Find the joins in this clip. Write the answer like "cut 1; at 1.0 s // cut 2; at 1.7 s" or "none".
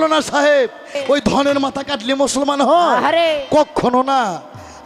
cut 1; at 1.0 s

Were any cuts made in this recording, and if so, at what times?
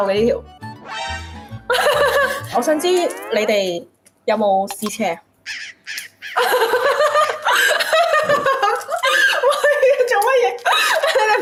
none

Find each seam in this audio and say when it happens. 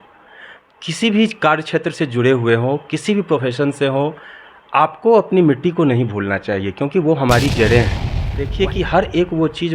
cut 1; at 8.4 s

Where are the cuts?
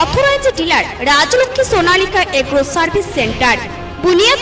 none

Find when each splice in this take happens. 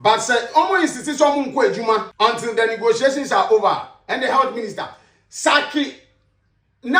cut 1; at 2.1 s

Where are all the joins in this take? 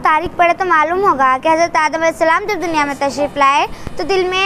none

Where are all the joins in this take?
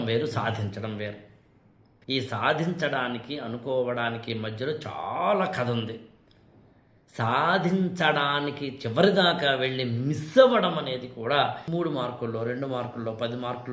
cut 1; at 11.6 s

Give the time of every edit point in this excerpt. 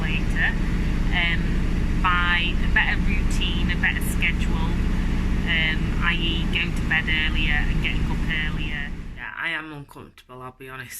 cut 1; at 9.0 s

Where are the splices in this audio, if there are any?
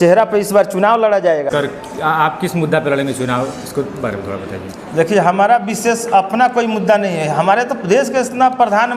cut 1; at 1.5 s

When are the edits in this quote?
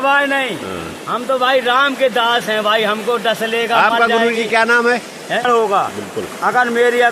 cut 1; at 5.4 s

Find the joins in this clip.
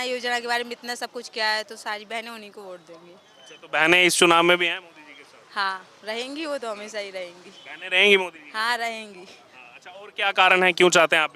none

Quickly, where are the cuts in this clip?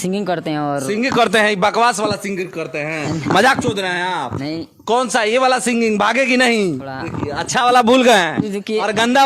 cut 1; at 6.9 s

